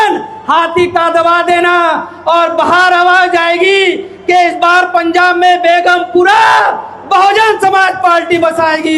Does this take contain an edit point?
no; 0 cuts

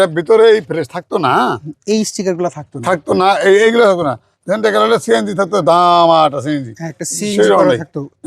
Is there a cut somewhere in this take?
no; 0 cuts

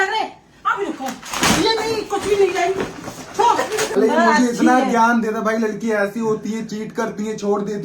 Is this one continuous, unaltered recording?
no; 1 cut; at 3.9 s

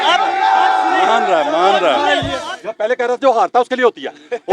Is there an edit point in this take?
yes; 1 cut; at 2.4 s

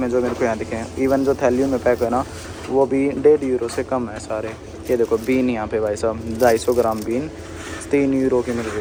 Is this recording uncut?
yes; 0 cuts

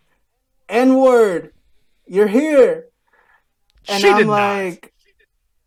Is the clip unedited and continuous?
yes; 0 cuts

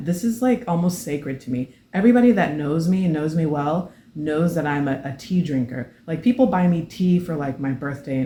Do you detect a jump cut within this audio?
no; 0 cuts

